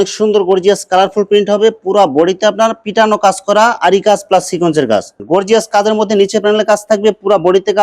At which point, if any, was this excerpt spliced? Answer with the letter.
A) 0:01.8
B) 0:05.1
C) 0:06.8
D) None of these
B